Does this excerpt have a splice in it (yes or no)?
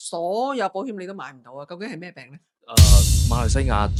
no